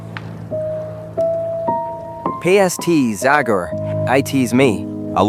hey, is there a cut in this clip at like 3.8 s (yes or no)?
no